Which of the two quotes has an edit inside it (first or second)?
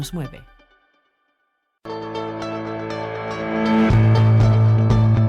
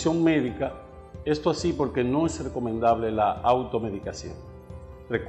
first